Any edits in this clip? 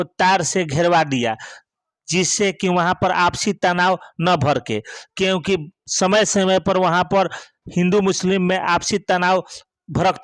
no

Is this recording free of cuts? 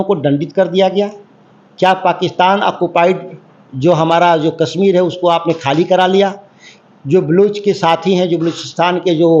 yes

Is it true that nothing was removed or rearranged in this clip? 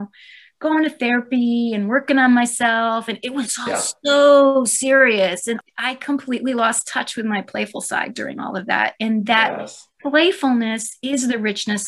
no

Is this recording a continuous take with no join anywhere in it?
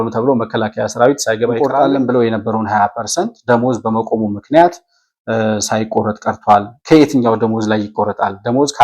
no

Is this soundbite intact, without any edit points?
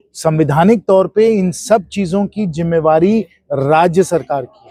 yes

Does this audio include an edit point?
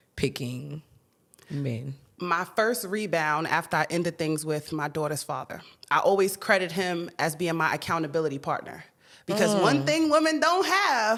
no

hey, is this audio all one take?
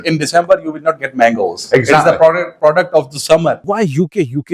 no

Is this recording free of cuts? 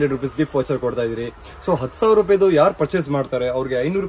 yes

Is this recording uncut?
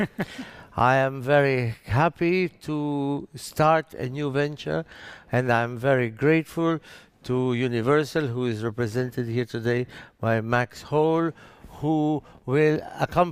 yes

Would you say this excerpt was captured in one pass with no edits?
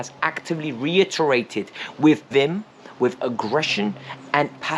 no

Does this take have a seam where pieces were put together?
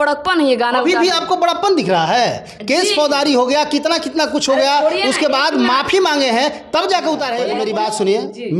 yes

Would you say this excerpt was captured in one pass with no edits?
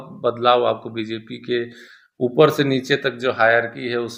yes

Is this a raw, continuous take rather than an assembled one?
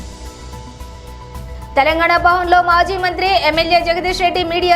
no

